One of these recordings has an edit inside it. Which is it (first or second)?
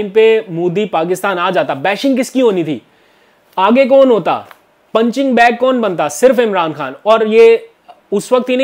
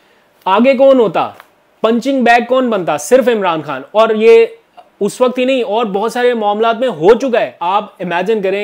second